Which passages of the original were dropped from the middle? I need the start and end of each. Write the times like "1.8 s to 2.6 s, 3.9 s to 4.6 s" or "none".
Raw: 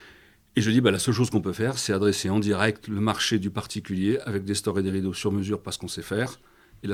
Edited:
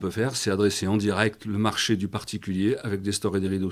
none